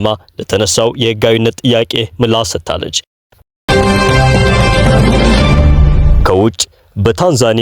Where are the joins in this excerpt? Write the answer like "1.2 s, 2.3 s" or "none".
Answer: 3.5 s, 6.1 s